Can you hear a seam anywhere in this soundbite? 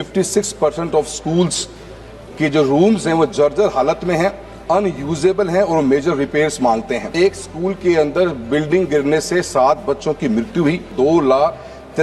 yes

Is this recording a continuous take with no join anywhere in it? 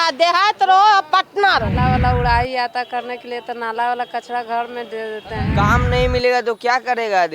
no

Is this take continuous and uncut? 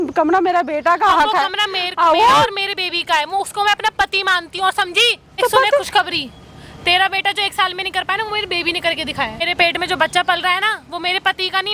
no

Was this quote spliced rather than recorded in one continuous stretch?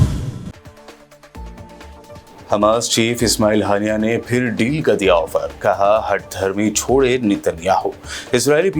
yes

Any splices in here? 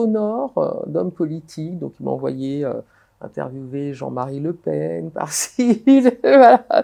no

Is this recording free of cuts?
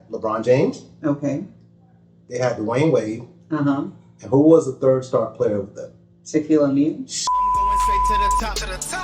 no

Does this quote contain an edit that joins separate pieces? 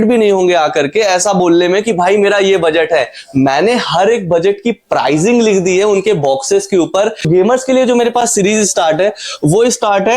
yes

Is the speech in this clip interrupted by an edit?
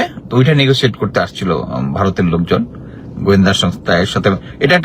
no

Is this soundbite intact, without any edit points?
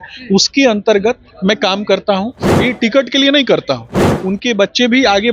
no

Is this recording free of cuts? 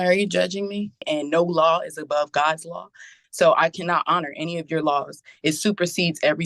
no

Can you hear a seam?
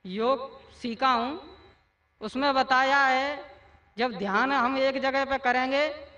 yes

